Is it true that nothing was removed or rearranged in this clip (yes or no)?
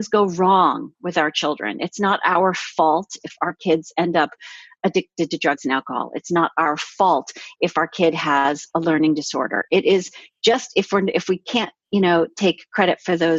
yes